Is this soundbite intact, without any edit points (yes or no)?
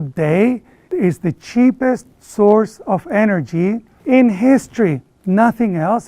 yes